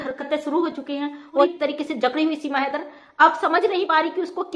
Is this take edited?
yes; 1 cut; at 1.4 s

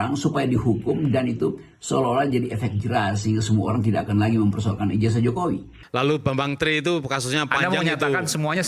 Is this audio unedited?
no; 1 cut; at 5.8 s

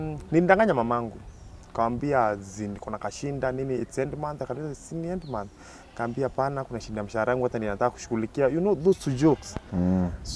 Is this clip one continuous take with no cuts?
yes; 0 cuts

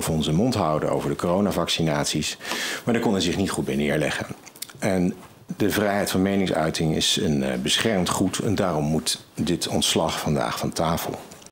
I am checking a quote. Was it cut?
no; 0 cuts

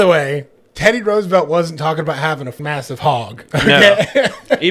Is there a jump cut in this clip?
yes; 1 cut; at 2.5 s

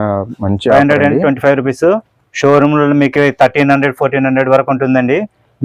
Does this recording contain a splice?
no; 0 cuts

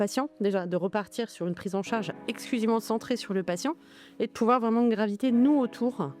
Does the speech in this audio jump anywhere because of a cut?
yes; 1 cut; at 2.2 s

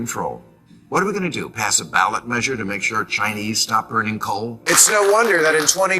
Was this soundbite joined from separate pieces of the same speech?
yes; 1 cut; at 4.6 s

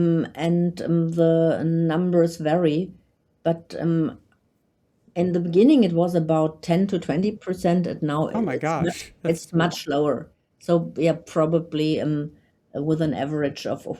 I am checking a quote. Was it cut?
no; 0 cuts

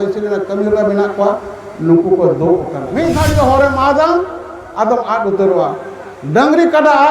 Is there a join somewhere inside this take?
yes; 1 cut; at 2.8 s

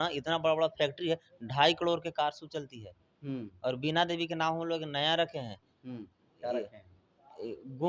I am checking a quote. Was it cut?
no; 0 cuts

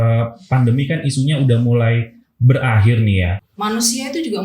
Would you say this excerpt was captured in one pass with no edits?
no; 1 cut; at 3.4 s

